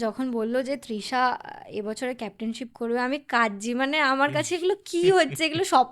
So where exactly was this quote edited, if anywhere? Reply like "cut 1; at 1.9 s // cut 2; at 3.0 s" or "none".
none